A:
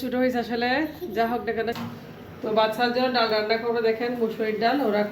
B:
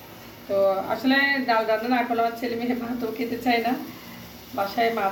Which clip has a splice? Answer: A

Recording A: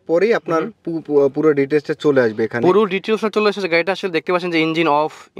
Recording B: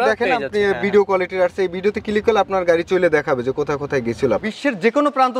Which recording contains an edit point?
B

